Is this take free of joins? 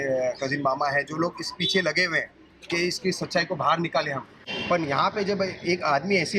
no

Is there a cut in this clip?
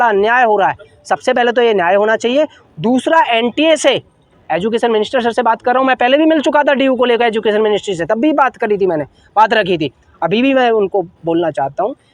no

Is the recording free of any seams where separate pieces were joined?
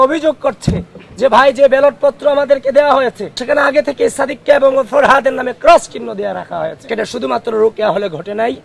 no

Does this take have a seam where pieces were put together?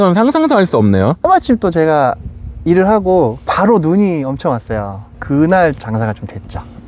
yes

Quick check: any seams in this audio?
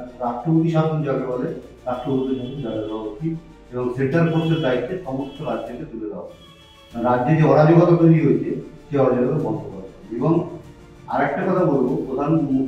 no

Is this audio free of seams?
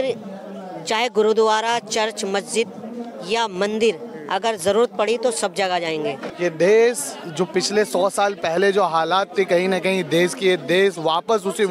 no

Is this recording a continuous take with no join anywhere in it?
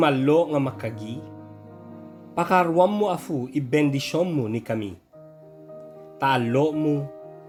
yes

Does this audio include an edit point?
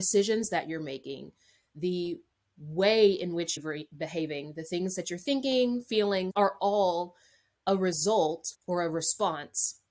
yes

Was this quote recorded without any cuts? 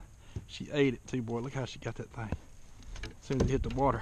yes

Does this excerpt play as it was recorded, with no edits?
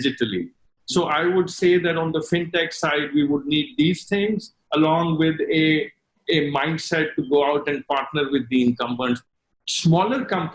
no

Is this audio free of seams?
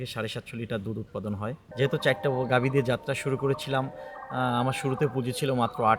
no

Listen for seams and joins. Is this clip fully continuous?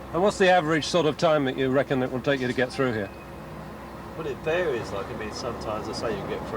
yes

